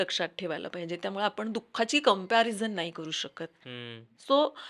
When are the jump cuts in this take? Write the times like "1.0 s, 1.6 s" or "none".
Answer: none